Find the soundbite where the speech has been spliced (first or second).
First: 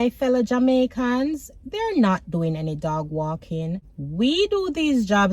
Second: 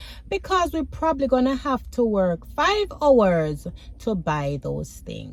first